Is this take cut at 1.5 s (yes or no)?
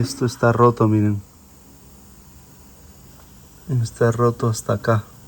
yes